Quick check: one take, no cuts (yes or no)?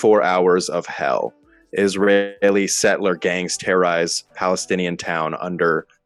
yes